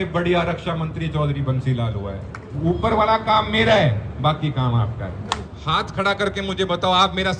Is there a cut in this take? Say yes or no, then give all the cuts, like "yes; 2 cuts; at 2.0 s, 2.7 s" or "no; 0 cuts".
yes; 2 cuts; at 2.6 s, 5.5 s